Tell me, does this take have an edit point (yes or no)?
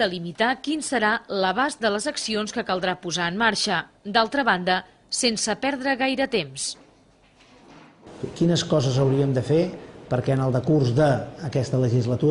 yes